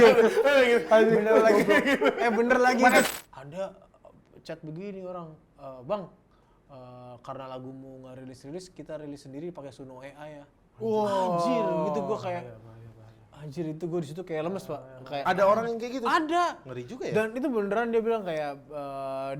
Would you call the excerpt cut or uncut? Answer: cut